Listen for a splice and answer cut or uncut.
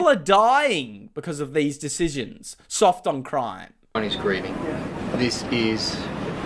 cut